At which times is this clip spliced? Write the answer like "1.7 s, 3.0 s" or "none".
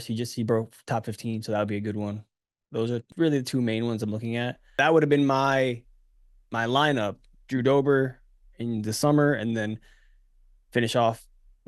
3.1 s, 4.8 s